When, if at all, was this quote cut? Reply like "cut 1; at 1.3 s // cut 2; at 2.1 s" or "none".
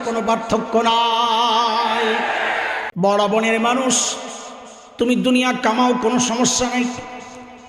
cut 1; at 2.8 s